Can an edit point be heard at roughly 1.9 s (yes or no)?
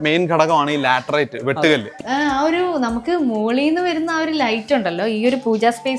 yes